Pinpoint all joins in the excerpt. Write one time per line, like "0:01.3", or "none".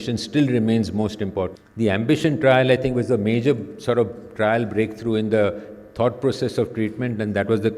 0:01.6